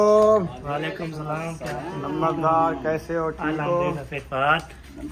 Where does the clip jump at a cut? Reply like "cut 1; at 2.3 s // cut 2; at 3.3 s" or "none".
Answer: none